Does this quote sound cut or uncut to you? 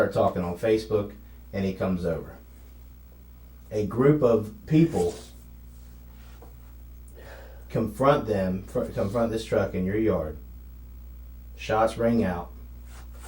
uncut